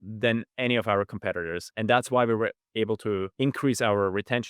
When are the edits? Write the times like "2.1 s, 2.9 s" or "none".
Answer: 1.7 s, 3.3 s